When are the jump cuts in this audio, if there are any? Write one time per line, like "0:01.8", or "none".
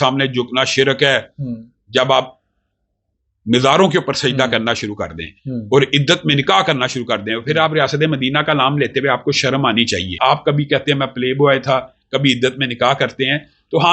0:10.1